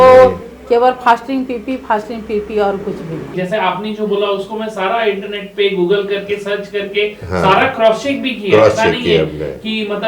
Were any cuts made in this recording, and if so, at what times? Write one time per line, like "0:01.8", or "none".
0:03.3